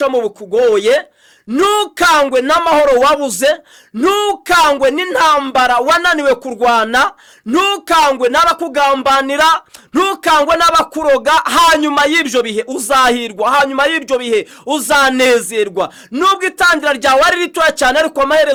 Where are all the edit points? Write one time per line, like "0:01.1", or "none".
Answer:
none